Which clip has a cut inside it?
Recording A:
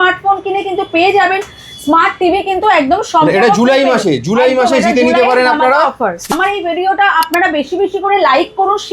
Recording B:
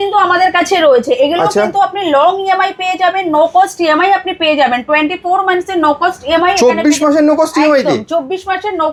A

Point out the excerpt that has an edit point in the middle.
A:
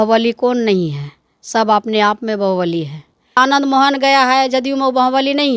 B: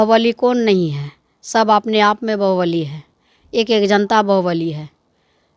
A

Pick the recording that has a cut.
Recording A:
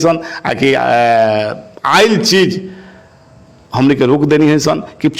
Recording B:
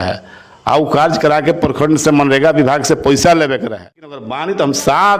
B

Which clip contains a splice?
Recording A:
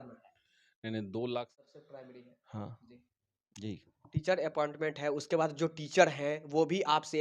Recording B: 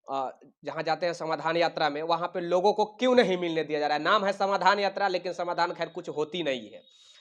A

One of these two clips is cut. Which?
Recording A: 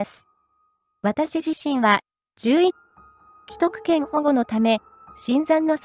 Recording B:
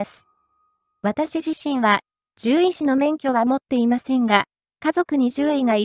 B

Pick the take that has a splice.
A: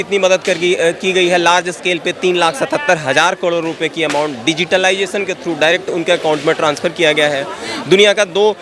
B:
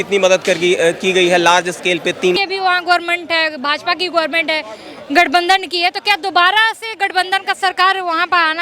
B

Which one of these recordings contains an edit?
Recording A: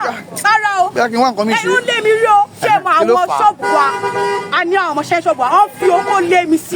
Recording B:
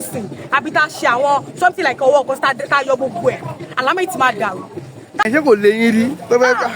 B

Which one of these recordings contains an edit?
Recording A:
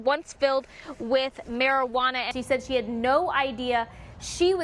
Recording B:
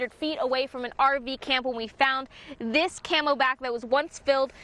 A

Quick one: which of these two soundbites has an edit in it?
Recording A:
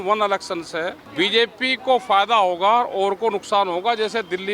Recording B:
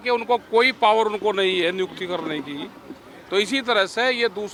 A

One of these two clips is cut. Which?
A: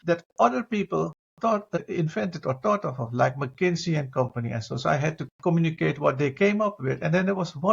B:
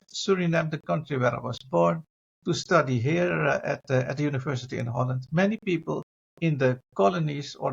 A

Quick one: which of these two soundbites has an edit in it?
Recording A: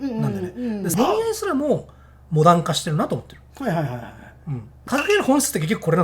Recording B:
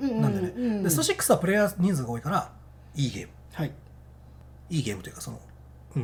A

